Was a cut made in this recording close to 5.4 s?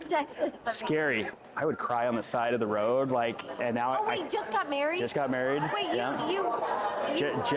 no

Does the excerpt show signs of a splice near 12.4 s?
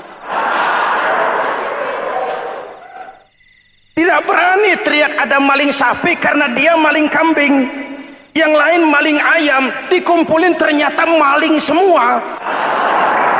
yes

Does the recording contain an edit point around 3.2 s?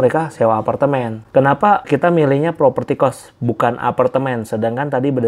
no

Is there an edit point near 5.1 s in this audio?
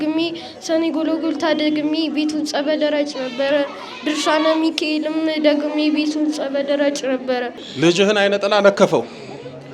no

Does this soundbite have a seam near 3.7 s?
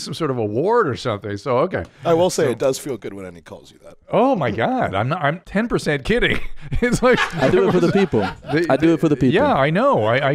no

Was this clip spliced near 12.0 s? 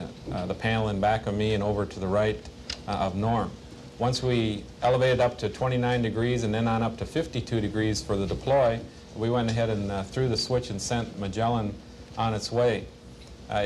yes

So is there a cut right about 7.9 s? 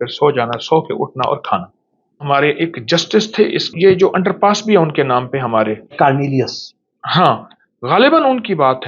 no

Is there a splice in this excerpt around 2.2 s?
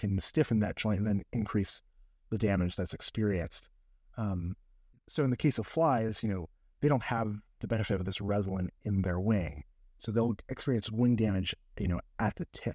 no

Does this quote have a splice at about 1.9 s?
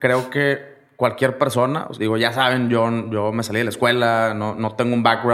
yes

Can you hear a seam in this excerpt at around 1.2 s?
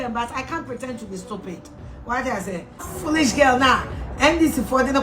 no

